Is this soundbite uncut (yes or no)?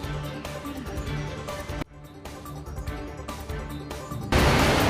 yes